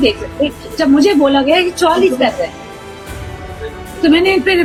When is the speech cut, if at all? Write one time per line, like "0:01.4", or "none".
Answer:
none